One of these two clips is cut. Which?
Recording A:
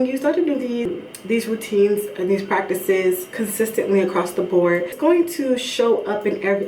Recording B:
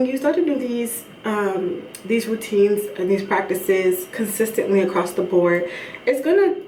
A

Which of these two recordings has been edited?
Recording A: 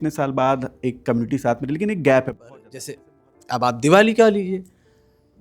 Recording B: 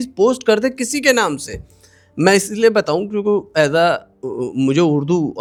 A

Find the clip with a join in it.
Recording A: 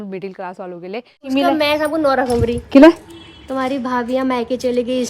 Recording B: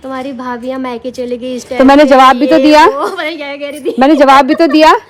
A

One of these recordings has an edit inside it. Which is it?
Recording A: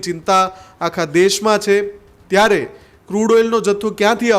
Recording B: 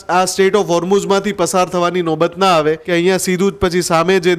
B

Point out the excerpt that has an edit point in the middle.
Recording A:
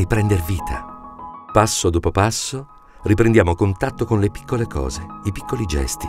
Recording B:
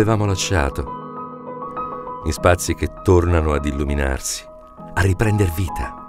B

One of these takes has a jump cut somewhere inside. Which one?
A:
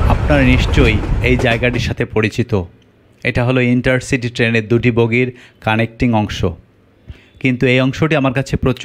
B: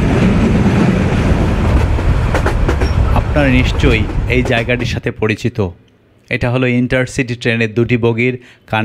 B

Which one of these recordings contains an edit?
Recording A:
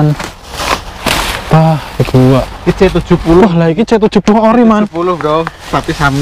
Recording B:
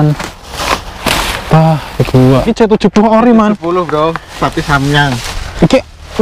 B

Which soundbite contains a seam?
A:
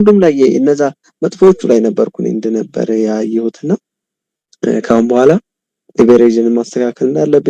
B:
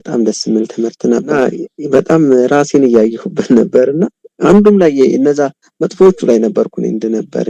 B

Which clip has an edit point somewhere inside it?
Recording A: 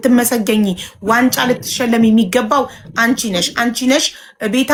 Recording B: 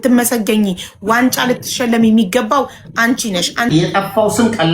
B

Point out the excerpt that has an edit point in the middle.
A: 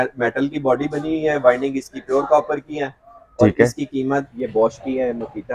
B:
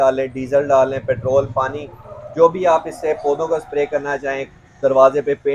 A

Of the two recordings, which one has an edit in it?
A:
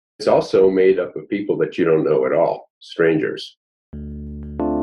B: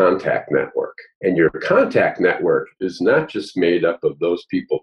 A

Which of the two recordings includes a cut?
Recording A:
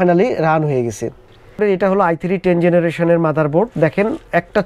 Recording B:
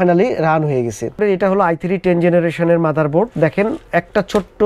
B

